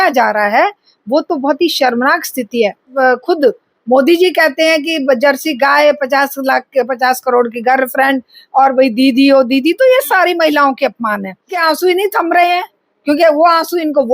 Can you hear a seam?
yes; 2 cuts; at 2.9 s, 11.6 s

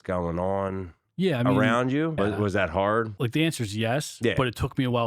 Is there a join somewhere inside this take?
yes; 2 cuts; at 2.2 s, 3.1 s

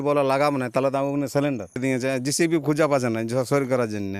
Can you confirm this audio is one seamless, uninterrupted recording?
no; 1 cut; at 1.8 s

